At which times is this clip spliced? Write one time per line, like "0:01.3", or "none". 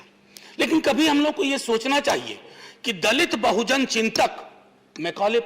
none